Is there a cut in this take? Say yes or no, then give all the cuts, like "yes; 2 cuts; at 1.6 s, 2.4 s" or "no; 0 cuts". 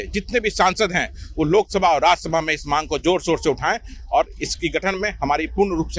no; 0 cuts